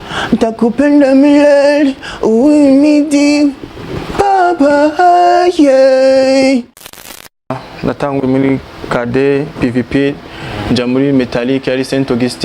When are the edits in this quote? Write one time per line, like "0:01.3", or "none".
0:07.1